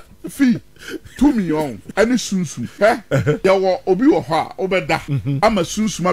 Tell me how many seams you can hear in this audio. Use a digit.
3